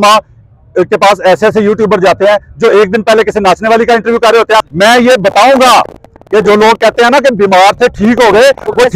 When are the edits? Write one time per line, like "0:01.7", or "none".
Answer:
0:04.6